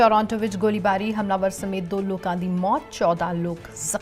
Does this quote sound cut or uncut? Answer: uncut